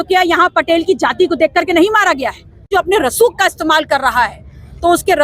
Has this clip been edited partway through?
yes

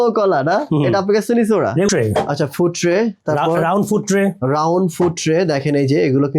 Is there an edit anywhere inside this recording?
yes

